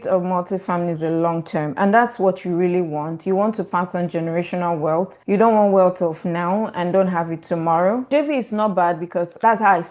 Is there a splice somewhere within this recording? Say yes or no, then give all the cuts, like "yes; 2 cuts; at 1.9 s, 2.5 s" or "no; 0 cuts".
yes; 1 cut; at 8.1 s